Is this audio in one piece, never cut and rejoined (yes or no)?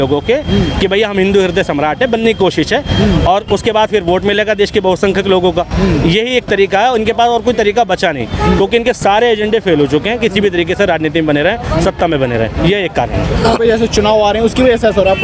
no